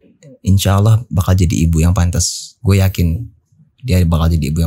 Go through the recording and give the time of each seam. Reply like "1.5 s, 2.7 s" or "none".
none